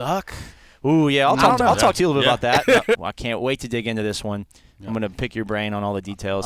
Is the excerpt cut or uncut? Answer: cut